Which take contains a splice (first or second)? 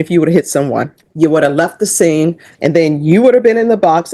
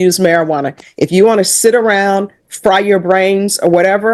first